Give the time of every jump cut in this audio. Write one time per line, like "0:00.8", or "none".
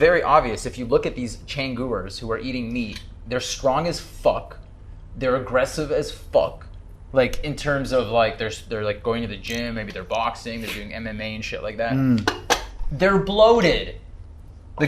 none